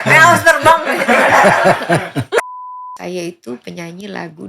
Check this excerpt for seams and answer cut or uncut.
cut